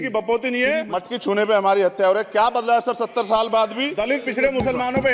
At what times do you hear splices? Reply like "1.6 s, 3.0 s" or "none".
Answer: 0.9 s, 3.9 s